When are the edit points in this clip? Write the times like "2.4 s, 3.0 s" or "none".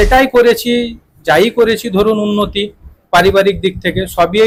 none